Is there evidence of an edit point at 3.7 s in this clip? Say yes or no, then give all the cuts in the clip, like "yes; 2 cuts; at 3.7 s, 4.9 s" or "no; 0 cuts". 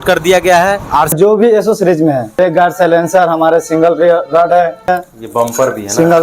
no; 3 cuts; at 1.1 s, 2.4 s, 4.9 s